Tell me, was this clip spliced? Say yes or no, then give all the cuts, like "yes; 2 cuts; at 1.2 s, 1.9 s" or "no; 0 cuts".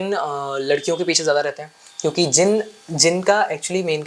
no; 0 cuts